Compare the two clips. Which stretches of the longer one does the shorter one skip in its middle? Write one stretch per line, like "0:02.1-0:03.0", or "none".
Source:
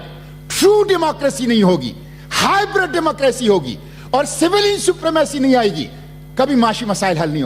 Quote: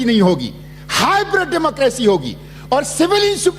none